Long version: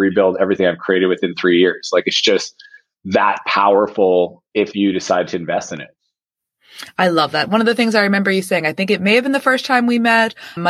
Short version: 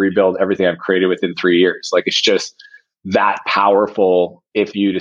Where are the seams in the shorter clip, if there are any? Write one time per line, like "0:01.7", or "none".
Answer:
none